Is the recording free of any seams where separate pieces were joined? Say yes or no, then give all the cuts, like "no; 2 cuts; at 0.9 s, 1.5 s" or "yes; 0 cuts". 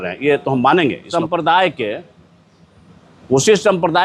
no; 1 cut; at 1.0 s